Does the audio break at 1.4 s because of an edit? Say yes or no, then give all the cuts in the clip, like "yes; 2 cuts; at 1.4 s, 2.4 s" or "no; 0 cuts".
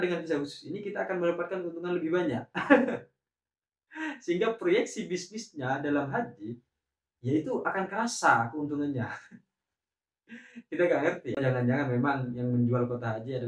no; 1 cut; at 11.4 s